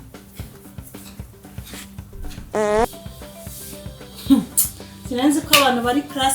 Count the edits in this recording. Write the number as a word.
one